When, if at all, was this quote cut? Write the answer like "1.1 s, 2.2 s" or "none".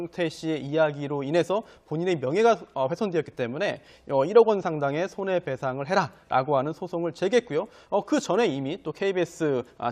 none